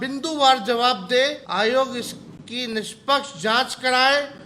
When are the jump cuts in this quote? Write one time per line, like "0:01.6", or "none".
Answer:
0:01.4